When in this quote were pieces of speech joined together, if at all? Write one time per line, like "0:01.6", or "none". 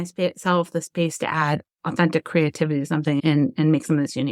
0:03.2